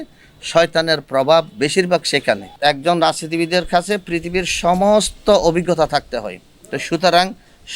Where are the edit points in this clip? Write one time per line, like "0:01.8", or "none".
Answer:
0:02.5